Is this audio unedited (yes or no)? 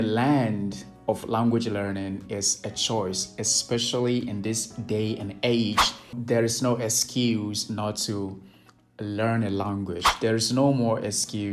no